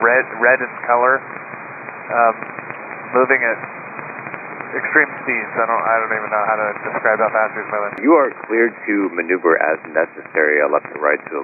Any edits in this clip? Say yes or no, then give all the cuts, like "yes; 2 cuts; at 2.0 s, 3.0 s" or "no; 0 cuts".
yes; 1 cut; at 8.0 s